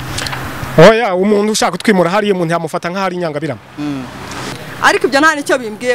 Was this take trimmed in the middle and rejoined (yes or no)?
yes